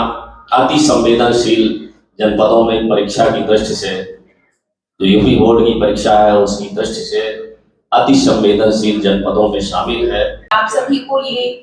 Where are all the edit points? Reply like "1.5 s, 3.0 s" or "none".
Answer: 10.5 s